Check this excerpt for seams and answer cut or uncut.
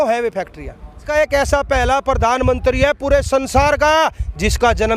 cut